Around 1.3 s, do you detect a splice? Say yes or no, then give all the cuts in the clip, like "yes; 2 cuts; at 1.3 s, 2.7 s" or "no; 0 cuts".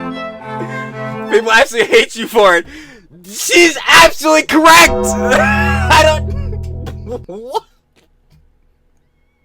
yes; 1 cut; at 1.3 s